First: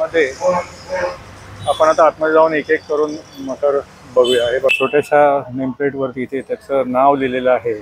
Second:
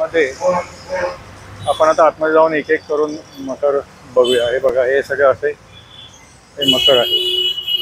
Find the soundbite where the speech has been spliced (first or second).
first